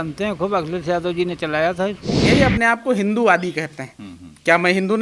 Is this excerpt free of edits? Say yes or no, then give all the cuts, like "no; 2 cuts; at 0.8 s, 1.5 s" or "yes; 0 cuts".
no; 1 cut; at 2.1 s